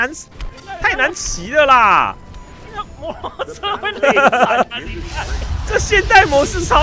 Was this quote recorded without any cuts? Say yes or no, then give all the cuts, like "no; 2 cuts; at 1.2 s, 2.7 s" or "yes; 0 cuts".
yes; 0 cuts